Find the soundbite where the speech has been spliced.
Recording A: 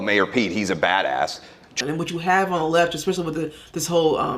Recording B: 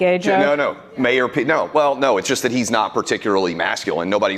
A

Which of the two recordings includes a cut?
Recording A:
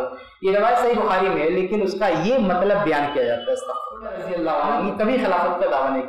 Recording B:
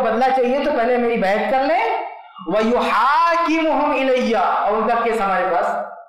A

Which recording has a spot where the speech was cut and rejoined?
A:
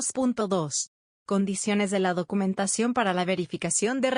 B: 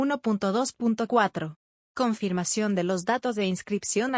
B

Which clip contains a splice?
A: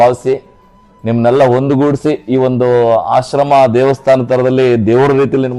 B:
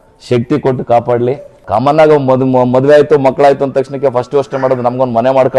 B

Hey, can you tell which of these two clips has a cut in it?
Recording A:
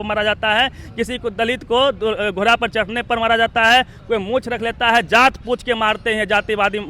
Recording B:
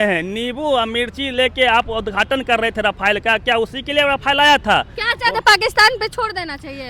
B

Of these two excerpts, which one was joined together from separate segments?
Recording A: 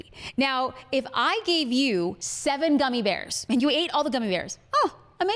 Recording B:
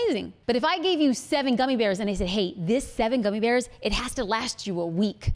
A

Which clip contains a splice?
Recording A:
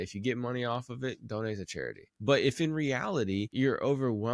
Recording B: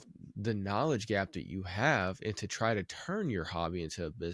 A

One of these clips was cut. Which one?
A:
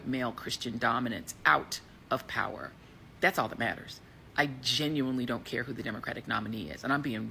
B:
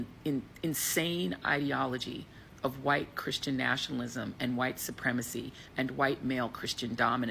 A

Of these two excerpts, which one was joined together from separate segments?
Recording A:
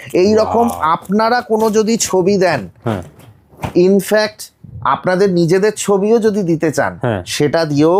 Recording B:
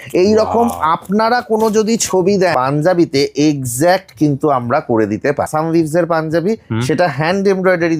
B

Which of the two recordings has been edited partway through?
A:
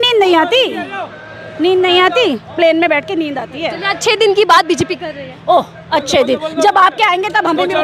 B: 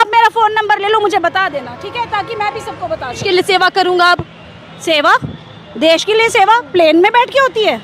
B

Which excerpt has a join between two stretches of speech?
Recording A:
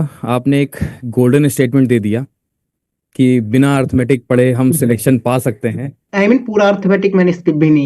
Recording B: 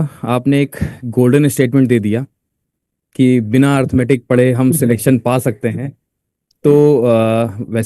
A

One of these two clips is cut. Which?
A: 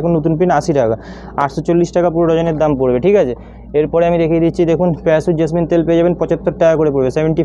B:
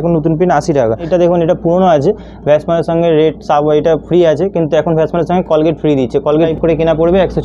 B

